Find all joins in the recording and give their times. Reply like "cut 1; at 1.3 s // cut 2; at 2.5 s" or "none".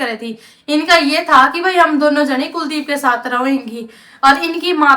none